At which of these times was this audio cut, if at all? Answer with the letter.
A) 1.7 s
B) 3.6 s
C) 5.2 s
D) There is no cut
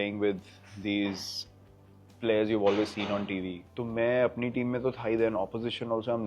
B